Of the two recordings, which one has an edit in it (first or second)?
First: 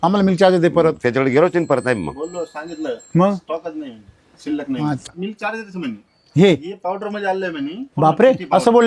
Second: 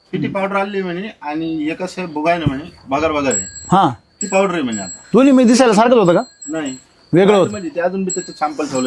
first